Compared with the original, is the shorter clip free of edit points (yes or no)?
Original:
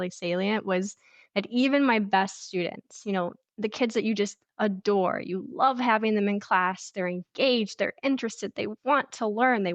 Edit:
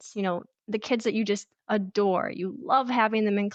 yes